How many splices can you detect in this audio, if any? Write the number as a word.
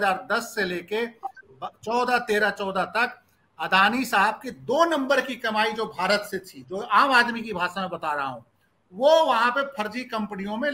zero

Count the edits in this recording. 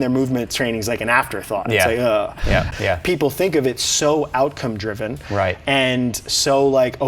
one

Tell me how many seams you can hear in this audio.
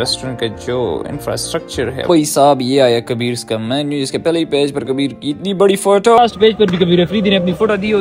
two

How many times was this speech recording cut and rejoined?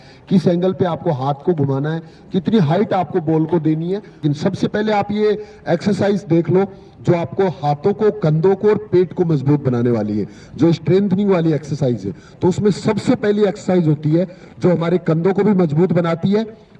zero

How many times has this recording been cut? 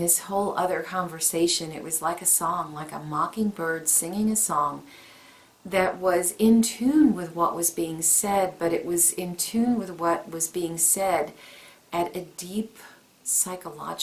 zero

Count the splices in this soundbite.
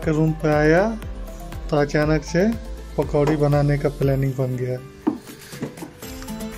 zero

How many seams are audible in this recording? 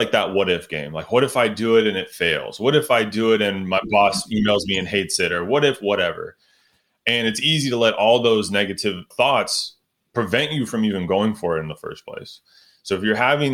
one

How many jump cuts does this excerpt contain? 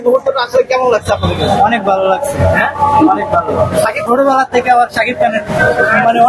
two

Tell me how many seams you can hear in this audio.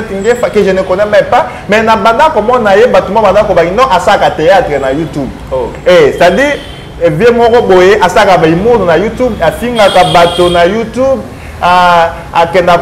zero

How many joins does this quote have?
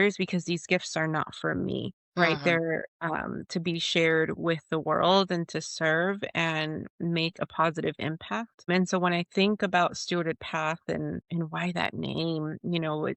three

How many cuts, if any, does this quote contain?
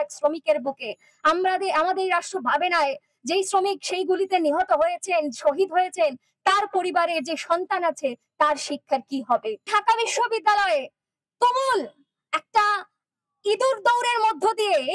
one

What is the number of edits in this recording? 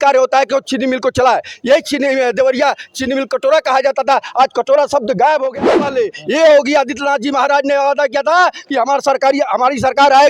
one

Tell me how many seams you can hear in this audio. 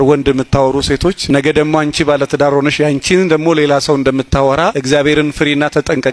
two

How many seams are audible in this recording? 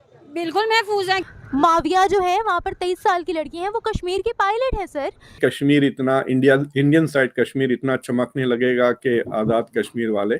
two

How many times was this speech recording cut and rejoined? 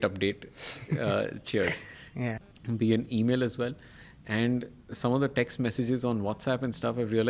one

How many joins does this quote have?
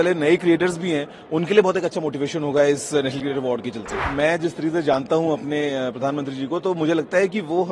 one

